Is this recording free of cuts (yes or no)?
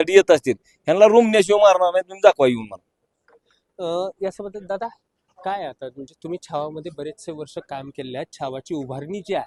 yes